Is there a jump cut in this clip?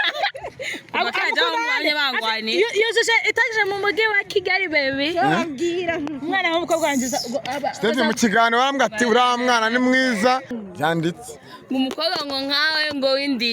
yes; 1 cut; at 10.6 s

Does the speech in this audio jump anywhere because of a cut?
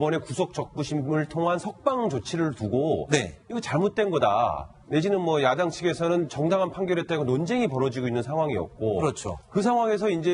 no; 0 cuts

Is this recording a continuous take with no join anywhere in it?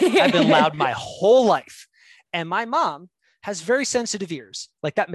yes; 0 cuts

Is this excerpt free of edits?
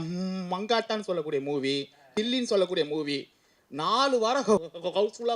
yes; 0 cuts

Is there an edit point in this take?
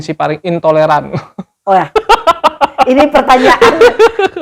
no; 0 cuts

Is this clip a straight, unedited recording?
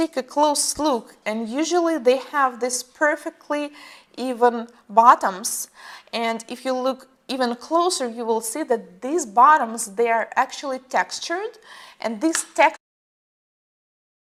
yes; 0 cuts

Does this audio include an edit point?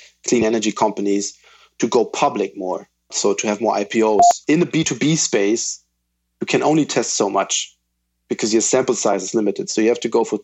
yes; 3 cuts; at 3.1 s, 4.3 s, 9.7 s

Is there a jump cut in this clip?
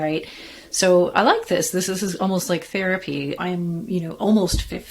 yes; 2 cuts; at 1.8 s, 3.4 s

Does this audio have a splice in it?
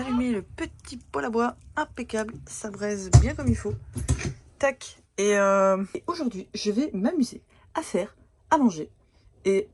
no; 0 cuts

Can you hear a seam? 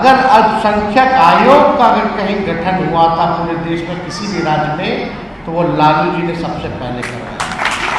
no; 0 cuts

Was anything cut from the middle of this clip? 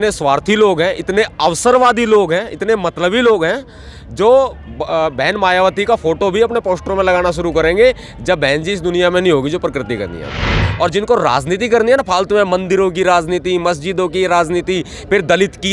yes; 1 cut; at 10.6 s

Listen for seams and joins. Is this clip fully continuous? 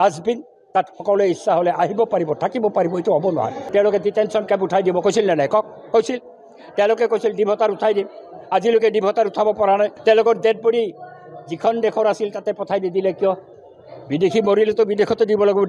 no; 2 cuts; at 3.6 s, 9.9 s

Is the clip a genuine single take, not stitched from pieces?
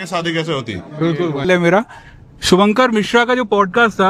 no; 1 cut; at 1.5 s

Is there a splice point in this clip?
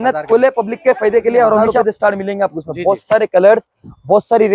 yes; 1 cut; at 1.7 s

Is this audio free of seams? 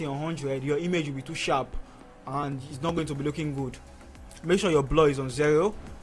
yes; 0 cuts

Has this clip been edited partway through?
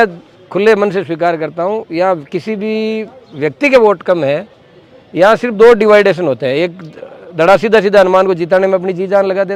no; 0 cuts

